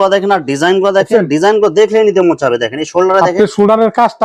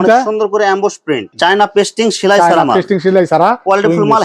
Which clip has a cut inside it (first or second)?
second